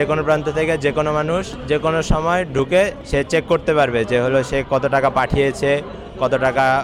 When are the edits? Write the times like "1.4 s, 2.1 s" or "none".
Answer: 1.5 s, 3.0 s

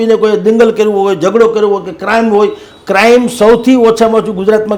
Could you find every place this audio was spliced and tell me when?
none

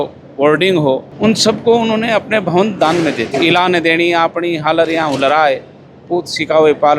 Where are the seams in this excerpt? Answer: 3.3 s

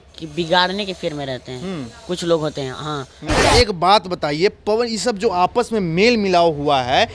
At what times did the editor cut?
3.5 s

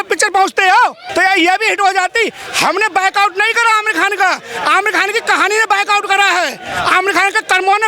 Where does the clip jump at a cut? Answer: 1.0 s

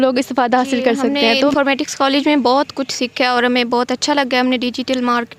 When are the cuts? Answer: 1.5 s

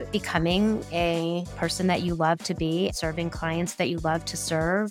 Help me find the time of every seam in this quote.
1.0 s, 2.9 s

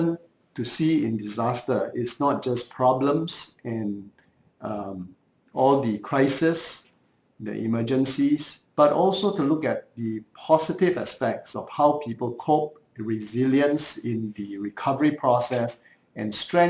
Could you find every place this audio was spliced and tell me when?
8.6 s

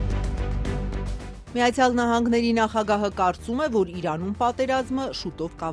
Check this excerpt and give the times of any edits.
1.4 s

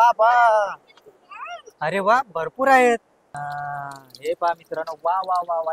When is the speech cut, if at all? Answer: 3.2 s

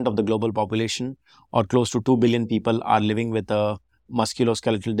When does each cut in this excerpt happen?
4.0 s

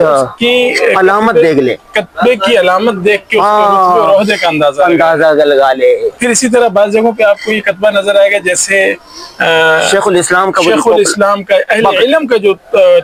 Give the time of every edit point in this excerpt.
none

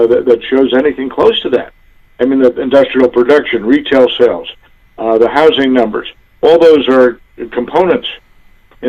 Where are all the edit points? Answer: none

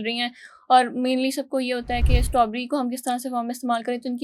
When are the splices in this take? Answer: none

